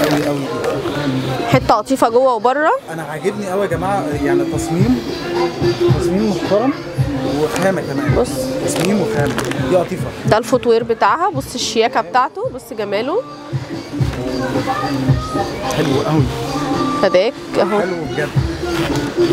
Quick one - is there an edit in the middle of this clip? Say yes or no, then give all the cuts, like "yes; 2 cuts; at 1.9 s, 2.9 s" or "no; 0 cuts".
no; 0 cuts